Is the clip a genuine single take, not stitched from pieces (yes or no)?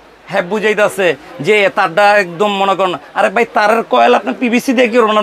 yes